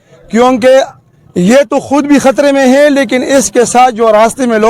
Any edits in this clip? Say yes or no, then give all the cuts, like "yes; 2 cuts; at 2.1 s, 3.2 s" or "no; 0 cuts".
no; 0 cuts